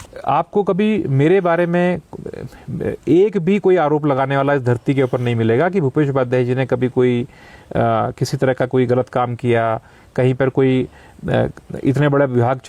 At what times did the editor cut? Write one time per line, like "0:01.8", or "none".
none